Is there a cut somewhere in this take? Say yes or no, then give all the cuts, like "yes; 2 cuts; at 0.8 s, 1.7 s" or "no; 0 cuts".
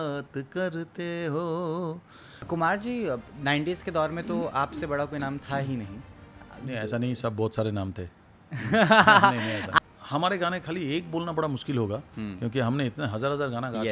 yes; 2 cuts; at 2.5 s, 9.7 s